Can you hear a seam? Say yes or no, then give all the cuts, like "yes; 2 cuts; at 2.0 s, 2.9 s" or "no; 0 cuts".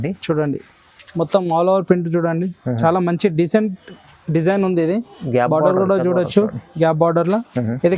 no; 0 cuts